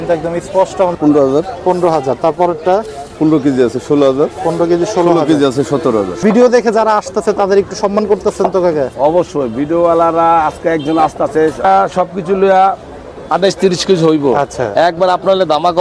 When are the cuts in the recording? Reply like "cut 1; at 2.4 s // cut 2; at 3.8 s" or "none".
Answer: cut 1; at 0.9 s // cut 2; at 6.2 s // cut 3; at 11.6 s